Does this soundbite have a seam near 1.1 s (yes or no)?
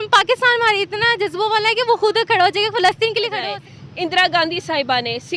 no